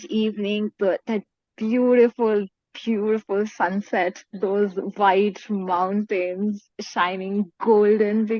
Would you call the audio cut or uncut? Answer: uncut